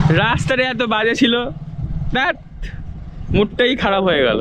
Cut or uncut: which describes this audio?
uncut